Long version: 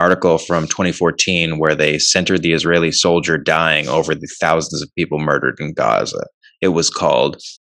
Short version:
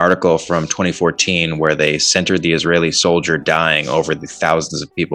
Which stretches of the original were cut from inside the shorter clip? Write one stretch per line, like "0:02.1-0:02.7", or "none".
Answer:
none

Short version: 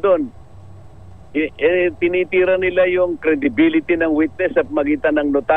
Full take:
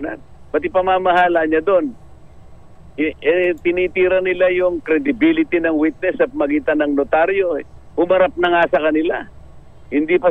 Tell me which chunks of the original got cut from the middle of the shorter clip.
none

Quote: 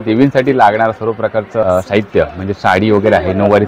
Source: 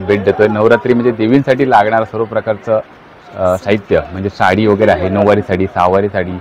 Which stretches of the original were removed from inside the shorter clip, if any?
0:02.8-0:03.4

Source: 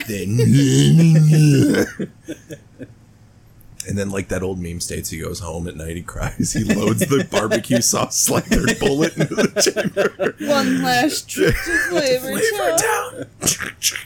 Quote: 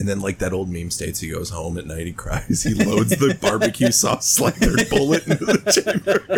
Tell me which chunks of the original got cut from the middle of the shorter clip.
none

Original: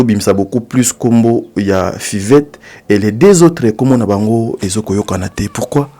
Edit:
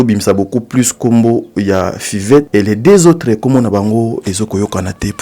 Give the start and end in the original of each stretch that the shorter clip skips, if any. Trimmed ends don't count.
0:02.5-0:02.8

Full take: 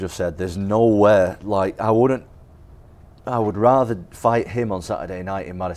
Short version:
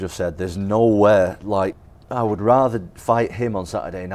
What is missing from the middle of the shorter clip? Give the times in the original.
0:01.8-0:02.9

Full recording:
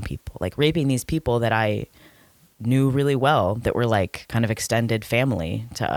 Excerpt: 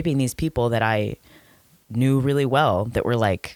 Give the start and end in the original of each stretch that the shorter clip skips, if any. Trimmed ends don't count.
none

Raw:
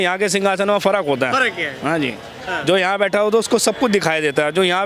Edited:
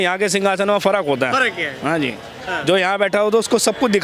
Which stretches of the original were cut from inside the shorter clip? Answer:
none

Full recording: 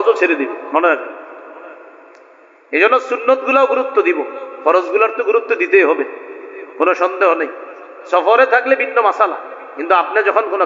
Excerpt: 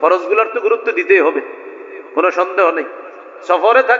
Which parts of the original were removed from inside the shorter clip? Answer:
none

